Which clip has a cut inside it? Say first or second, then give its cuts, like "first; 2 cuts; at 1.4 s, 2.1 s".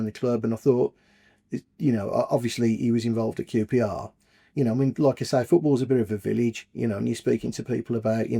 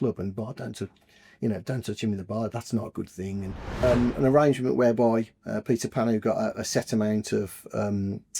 second; 1 cut; at 3.8 s